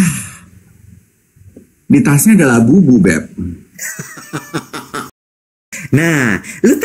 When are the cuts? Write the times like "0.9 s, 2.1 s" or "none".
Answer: 5.6 s